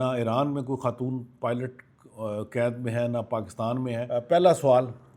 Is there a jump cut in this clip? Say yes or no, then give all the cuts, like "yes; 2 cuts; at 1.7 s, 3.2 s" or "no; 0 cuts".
yes; 1 cut; at 4.1 s